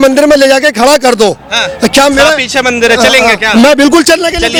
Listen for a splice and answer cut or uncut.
uncut